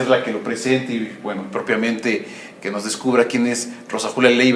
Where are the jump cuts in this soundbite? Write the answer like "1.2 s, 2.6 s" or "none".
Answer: 3.2 s